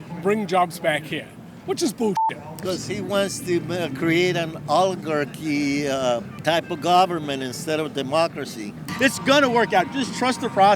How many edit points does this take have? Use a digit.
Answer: 2